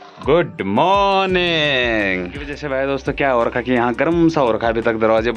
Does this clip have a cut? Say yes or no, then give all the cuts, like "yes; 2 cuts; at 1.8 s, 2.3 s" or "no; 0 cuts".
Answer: yes; 1 cut; at 2.6 s